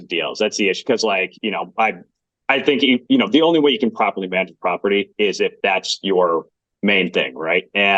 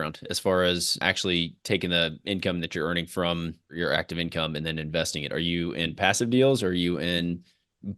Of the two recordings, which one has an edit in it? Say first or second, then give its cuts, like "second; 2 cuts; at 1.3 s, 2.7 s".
second; 2 cuts; at 1.0 s, 3.7 s